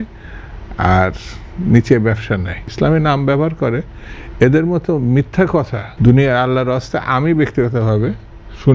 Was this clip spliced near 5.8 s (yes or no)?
yes